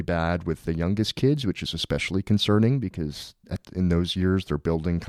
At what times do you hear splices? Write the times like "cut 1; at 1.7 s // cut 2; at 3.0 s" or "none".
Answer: none